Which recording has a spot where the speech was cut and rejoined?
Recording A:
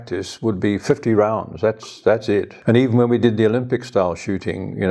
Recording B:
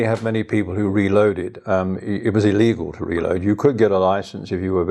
A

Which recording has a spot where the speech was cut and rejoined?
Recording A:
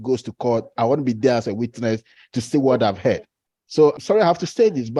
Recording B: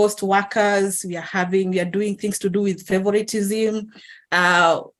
A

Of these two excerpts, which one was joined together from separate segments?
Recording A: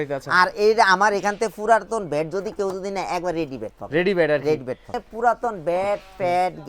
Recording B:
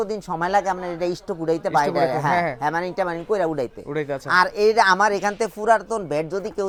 A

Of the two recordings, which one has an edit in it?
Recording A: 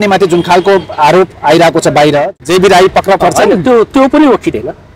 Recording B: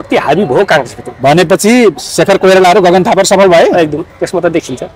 A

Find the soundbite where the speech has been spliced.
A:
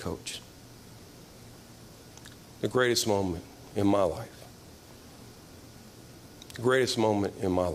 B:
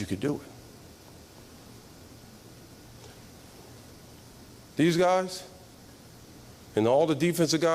B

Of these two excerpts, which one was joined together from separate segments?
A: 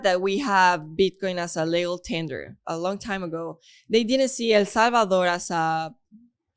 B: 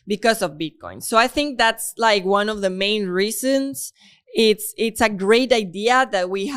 A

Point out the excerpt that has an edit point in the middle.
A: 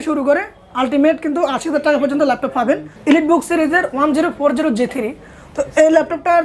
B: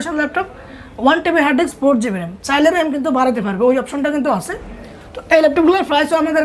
A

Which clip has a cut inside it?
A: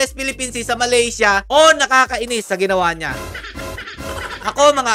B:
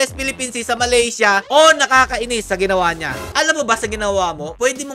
B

